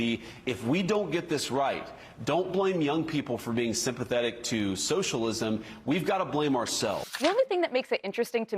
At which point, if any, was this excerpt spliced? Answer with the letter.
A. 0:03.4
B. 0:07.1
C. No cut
B